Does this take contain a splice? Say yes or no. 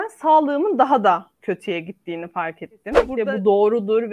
yes